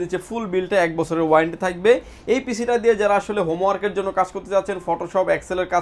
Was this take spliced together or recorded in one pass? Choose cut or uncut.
uncut